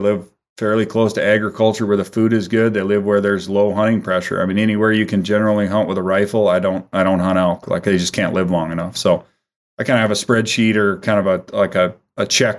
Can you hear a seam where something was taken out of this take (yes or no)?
no